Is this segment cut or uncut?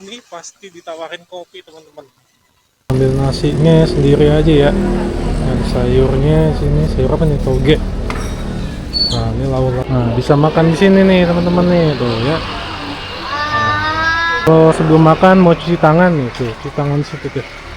cut